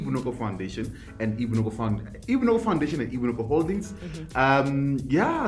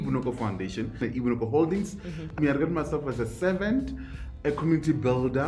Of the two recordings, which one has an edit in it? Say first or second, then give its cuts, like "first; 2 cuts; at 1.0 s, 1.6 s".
second; 3 cuts; at 1.0 s, 2.3 s, 4.3 s